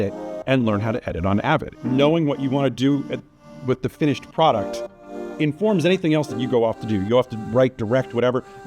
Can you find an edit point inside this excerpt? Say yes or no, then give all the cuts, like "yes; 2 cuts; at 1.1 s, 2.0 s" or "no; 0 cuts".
yes; 1 cut; at 1.7 s